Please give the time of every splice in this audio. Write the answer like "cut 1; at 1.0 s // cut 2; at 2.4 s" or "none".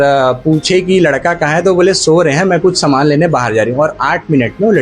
none